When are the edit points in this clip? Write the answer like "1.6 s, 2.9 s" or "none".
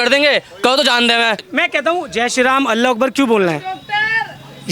1.4 s